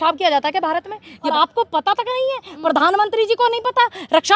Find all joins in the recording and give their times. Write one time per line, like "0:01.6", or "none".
0:01.3